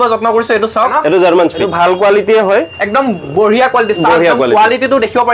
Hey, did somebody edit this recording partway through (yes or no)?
yes